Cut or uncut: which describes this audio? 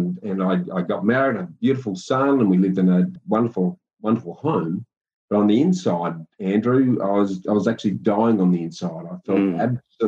cut